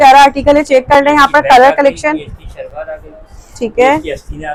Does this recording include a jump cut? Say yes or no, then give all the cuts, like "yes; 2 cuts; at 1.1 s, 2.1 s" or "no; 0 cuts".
no; 0 cuts